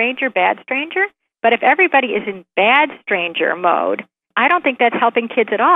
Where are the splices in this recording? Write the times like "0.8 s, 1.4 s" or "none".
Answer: 4.3 s